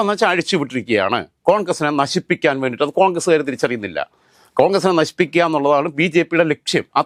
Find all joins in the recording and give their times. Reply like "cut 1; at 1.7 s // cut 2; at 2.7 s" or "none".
none